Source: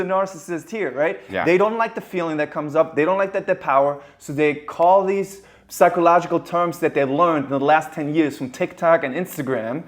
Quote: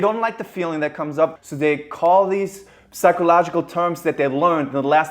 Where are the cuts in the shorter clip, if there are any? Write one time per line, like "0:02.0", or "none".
0:01.3